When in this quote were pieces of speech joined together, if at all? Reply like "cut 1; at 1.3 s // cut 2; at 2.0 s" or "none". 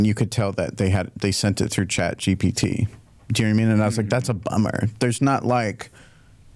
none